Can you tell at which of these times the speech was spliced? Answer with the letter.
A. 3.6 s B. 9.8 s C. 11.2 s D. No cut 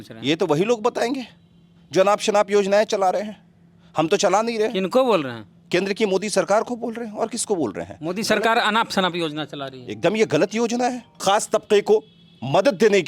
C